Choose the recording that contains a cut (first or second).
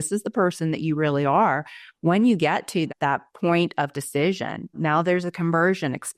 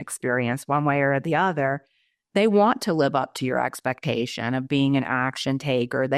first